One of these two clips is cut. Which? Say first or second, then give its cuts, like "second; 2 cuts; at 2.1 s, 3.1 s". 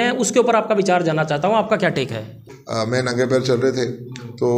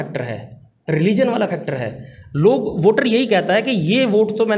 first; 1 cut; at 2.4 s